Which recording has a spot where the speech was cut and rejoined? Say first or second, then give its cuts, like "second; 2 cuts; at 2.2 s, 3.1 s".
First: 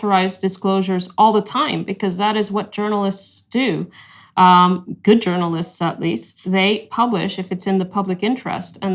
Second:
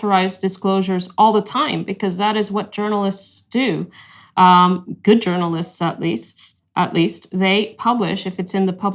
first; 1 cut; at 6.3 s